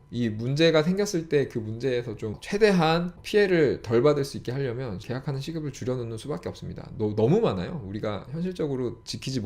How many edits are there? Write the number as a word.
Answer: three